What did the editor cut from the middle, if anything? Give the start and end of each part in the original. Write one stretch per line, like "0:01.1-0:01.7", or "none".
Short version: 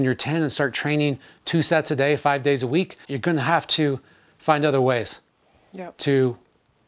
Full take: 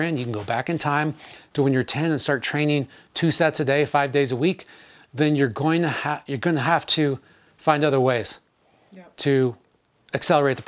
0:04.7-0:06.2